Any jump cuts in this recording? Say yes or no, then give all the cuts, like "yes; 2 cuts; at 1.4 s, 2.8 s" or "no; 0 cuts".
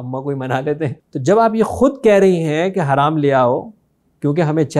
yes; 1 cut; at 1.0 s